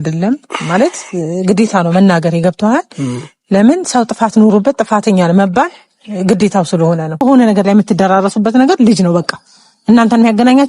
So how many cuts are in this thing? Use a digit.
1